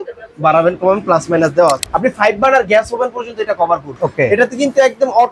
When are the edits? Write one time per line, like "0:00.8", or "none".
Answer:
0:01.8
0:04.0